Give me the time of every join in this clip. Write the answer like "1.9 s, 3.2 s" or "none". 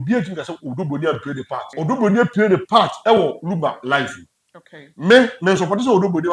1.7 s